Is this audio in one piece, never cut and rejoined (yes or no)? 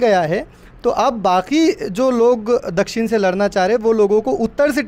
yes